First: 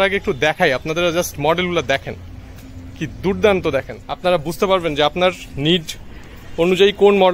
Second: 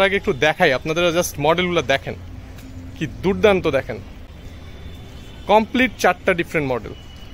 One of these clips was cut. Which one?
first; 1 cut; at 4.0 s

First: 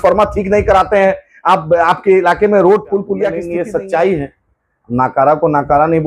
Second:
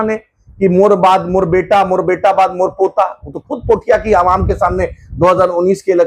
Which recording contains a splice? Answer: first; 1 cut; at 3.5 s

